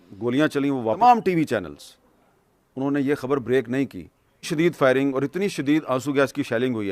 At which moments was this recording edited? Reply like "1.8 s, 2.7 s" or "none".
1.0 s, 4.5 s